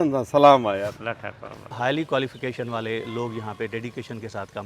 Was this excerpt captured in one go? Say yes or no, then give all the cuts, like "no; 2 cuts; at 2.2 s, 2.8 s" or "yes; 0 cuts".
no; 1 cut; at 1.7 s